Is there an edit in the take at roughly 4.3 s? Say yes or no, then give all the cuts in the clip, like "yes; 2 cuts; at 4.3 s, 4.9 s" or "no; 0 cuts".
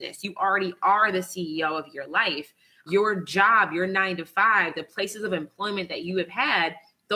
no; 2 cuts; at 0.8 s, 2.9 s